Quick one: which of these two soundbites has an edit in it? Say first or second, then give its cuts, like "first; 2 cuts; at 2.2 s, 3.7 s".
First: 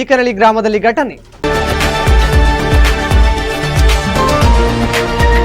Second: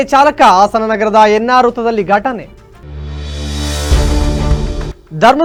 first; 1 cut; at 1.3 s